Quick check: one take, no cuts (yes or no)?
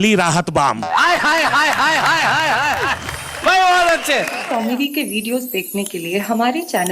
no